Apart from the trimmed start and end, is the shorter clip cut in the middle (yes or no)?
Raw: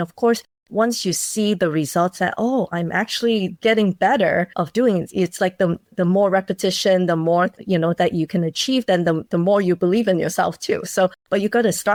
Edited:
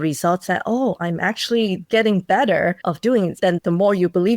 yes